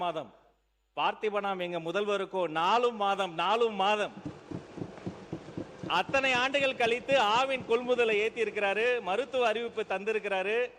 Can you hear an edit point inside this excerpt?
no; 0 cuts

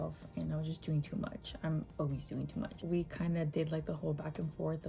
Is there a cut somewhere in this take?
yes; 1 cut; at 2.8 s

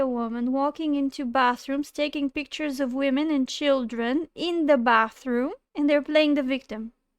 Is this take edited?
yes; 1 cut; at 5.6 s

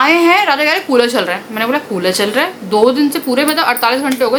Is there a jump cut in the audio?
no; 0 cuts

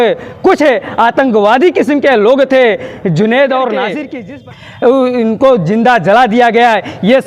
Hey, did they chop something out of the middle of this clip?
yes; 1 cut; at 4.0 s

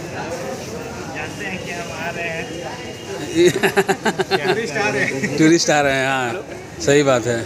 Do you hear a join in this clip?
no; 0 cuts

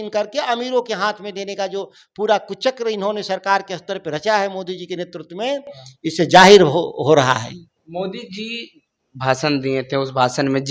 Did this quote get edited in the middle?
no; 0 cuts

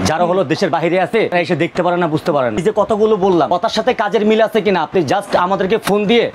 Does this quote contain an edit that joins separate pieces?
yes; 3 cuts; at 1.3 s, 2.6 s, 3.5 s

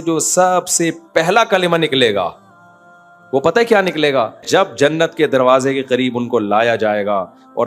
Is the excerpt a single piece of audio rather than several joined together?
no; 1 cut; at 4.4 s

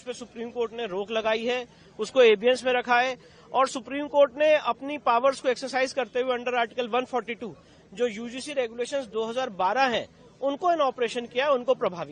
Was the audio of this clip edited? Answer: no; 0 cuts

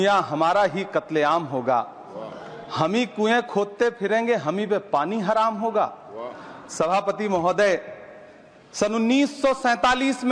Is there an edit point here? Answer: no; 0 cuts

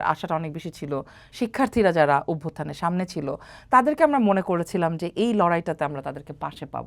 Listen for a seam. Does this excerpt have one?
no; 0 cuts

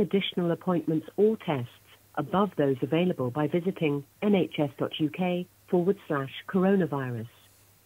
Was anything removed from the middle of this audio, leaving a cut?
yes; 1 cut; at 5.5 s

